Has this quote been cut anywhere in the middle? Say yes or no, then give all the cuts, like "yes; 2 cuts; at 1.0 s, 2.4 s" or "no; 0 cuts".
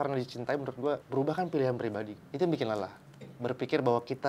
yes; 2 cuts; at 1.0 s, 2.2 s